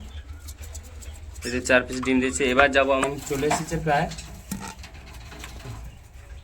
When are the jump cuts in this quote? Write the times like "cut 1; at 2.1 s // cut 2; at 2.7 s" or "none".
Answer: cut 1; at 3.0 s